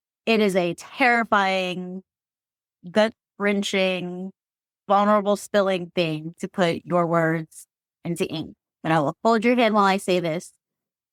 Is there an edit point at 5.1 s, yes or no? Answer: no